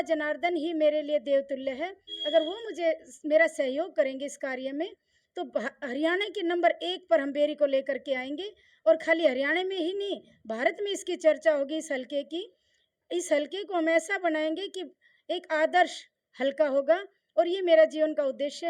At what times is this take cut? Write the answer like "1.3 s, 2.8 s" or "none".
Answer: none